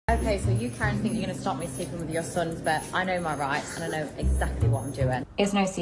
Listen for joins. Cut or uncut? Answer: uncut